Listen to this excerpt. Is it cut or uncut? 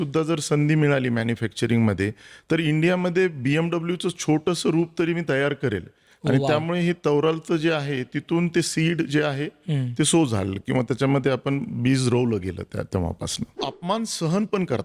cut